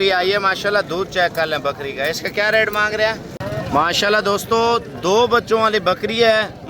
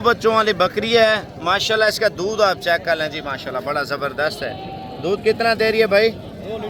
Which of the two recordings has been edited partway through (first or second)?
first